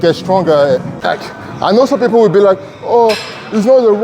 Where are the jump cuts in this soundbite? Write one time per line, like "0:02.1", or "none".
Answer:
0:01.0